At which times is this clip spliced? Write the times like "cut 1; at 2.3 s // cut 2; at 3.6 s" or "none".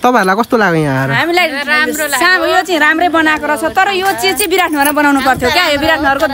none